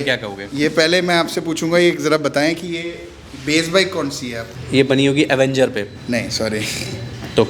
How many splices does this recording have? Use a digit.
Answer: 2